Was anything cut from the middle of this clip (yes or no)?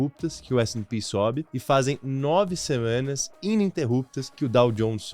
yes